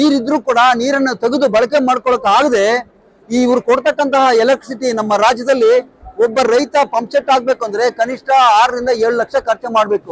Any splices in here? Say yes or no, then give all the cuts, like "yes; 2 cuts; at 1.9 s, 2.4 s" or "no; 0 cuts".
no; 0 cuts